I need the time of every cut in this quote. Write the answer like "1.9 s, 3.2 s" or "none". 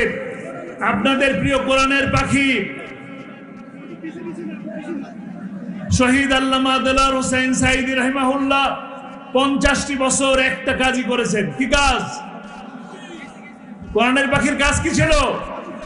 none